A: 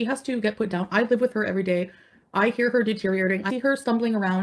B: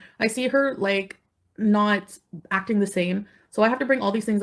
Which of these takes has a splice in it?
A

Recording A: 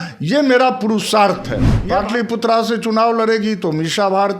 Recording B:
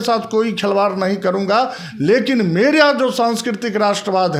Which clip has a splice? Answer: A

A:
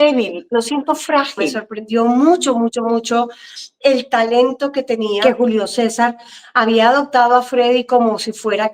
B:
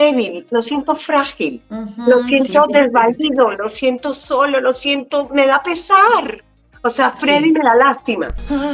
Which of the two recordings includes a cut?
A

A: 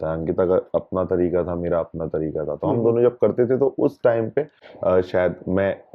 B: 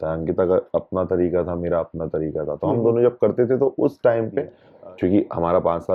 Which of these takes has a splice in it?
B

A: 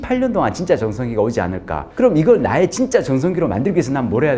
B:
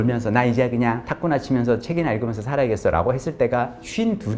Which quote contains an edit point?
B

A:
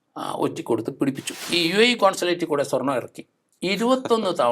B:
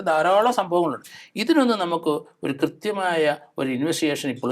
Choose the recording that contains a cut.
A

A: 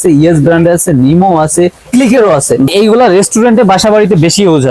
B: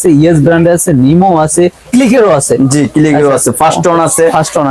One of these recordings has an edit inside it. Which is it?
A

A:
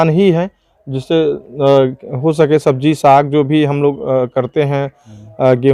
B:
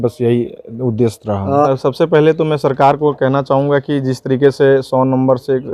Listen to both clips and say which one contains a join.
B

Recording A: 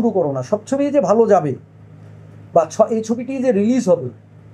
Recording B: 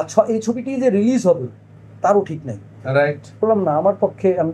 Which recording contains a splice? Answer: B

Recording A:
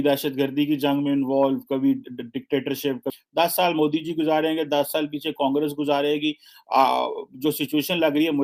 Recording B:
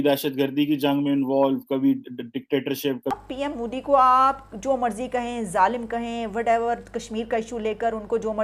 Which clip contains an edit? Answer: B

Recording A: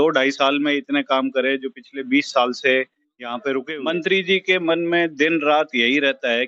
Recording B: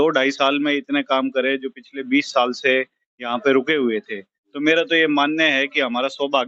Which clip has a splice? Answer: A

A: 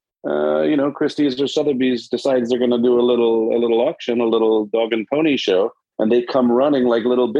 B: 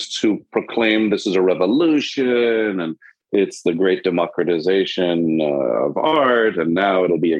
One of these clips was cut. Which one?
B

